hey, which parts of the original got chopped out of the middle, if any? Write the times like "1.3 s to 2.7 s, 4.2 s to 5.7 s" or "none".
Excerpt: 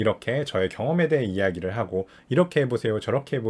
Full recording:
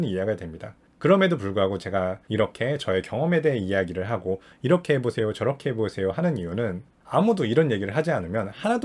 none